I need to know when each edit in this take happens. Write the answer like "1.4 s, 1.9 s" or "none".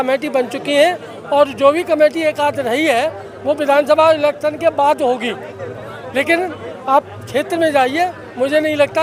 none